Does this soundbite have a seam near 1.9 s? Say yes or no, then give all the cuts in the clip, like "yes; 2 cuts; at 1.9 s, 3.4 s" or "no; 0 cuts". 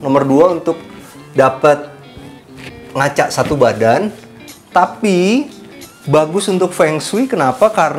no; 0 cuts